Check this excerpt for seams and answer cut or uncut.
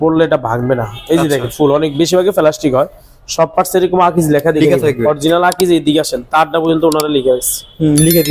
uncut